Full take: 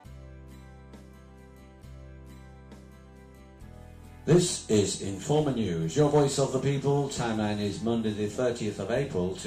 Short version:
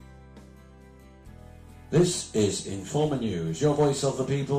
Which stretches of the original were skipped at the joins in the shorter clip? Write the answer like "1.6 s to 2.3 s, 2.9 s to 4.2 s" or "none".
1.8 s to 3.5 s